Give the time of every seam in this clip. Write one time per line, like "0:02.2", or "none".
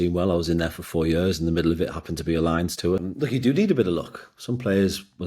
0:03.0